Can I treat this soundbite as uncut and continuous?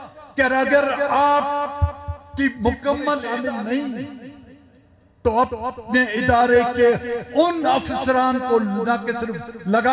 no; 1 cut; at 3.3 s

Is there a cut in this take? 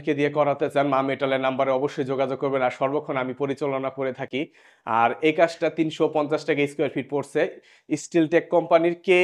no; 0 cuts

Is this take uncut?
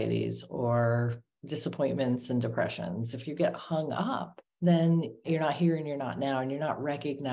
no; 3 cuts; at 1.3 s, 4.4 s, 5.2 s

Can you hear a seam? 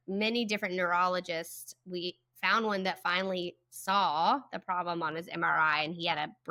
no; 0 cuts

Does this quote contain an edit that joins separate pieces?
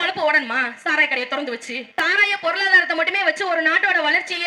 yes; 1 cut; at 1.9 s

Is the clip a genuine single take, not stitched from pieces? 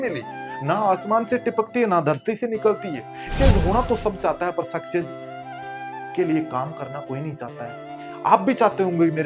no; 1 cut; at 3.3 s

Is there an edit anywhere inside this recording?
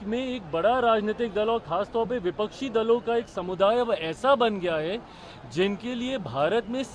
no; 0 cuts

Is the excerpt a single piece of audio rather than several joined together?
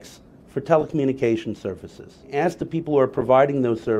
no; 1 cut; at 2.3 s

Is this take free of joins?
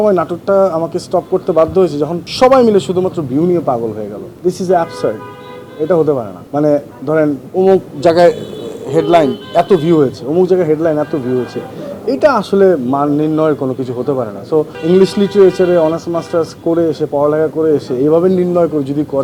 no; 5 cuts; at 2.2 s, 4.2 s, 6.4 s, 7.4 s, 14.7 s

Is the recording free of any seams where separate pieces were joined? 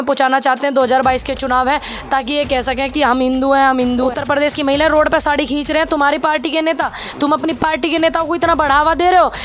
no; 1 cut; at 4.1 s

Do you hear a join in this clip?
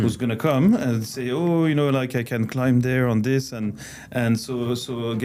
no; 0 cuts

